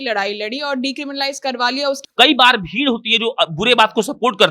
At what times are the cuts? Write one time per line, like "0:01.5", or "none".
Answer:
0:02.0